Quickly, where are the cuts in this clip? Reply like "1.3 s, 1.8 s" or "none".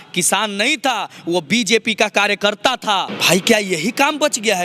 3.1 s